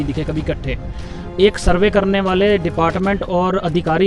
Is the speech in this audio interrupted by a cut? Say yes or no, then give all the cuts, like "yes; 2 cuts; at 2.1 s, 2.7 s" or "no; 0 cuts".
no; 0 cuts